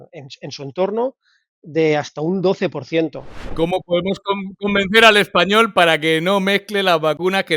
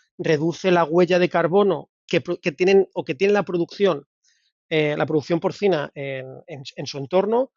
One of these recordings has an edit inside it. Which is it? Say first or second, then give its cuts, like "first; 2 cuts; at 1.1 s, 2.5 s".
first; 1 cut; at 3.5 s